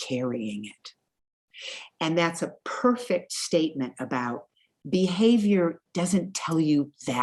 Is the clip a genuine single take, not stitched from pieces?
yes; 0 cuts

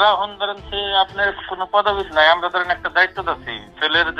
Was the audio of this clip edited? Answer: no; 0 cuts

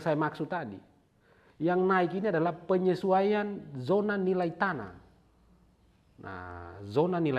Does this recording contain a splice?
no; 0 cuts

